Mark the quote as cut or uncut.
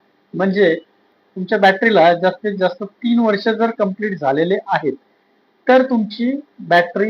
uncut